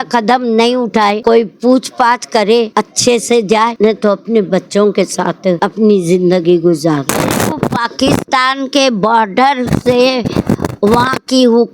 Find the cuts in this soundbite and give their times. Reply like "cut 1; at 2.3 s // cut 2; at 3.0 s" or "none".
cut 1; at 1.2 s // cut 2; at 2.7 s // cut 3; at 3.7 s // cut 4; at 5.6 s // cut 5; at 7.1 s